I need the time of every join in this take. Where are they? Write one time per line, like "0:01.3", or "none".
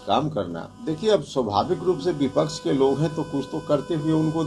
0:01.0